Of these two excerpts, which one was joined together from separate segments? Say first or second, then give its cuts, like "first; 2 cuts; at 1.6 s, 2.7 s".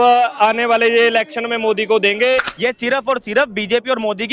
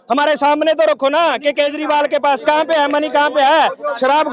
first; 1 cut; at 2.5 s